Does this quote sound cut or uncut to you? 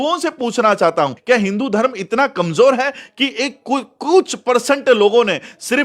cut